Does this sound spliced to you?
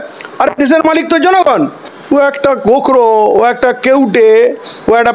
yes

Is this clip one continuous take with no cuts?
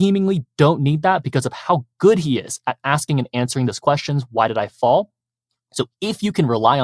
yes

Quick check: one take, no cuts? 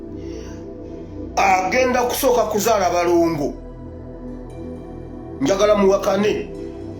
yes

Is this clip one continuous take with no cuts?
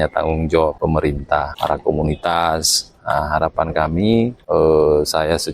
no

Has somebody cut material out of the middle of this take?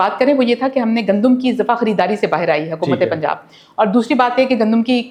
no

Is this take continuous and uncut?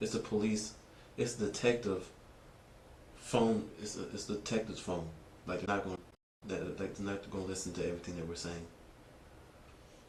yes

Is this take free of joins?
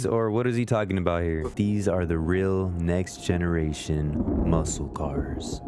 no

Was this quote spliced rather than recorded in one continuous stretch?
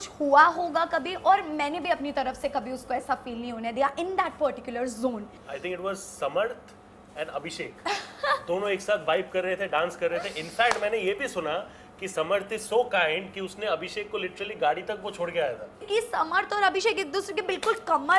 yes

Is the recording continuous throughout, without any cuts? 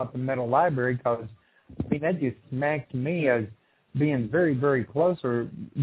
no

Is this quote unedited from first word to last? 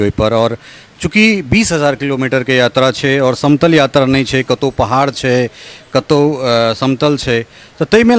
yes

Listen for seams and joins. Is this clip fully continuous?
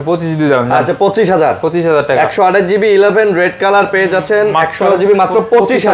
yes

